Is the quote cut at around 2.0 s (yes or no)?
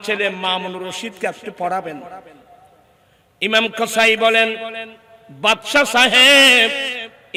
no